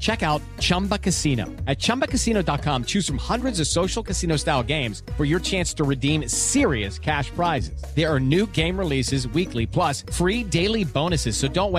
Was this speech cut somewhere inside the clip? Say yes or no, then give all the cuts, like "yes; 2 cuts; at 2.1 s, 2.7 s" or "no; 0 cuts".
no; 0 cuts